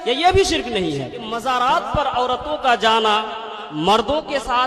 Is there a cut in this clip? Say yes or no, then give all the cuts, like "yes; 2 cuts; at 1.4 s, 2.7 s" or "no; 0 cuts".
yes; 1 cut; at 1.4 s